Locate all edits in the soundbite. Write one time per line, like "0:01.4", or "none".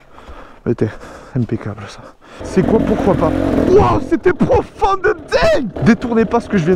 0:02.4
0:05.7